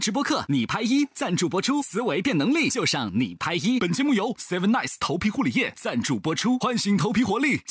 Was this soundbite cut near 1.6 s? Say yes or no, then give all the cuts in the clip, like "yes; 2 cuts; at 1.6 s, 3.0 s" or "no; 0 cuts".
no; 0 cuts